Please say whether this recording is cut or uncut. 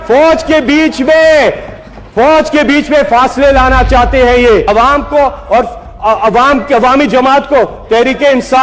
cut